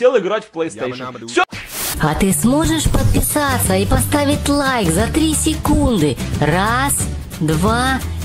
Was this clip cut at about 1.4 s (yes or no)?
yes